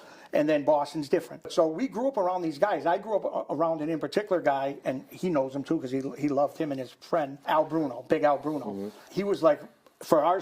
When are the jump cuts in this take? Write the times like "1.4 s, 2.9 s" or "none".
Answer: 1.5 s, 7.4 s, 9.1 s